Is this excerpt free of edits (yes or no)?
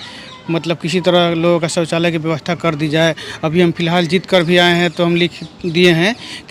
yes